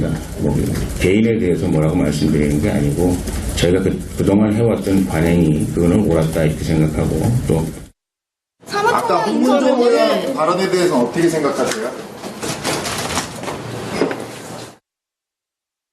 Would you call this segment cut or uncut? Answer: uncut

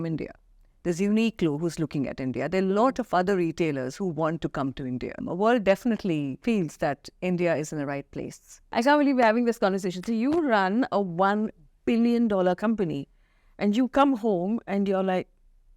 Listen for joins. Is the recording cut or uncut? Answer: cut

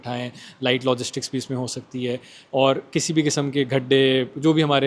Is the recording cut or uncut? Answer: uncut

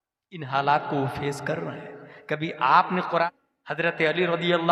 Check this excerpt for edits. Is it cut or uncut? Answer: cut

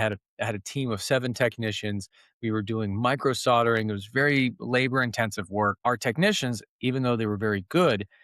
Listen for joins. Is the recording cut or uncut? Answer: cut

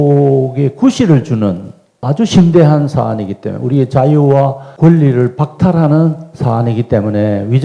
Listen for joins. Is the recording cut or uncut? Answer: uncut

